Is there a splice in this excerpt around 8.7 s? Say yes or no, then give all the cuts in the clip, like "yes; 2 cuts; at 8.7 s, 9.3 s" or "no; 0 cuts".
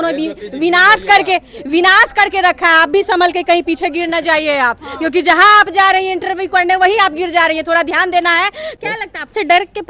yes; 1 cut; at 8.7 s